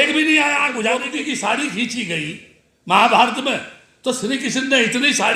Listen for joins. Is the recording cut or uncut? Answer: cut